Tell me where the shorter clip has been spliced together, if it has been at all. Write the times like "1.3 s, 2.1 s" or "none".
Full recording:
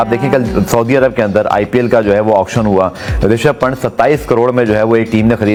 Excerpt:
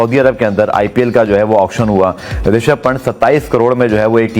none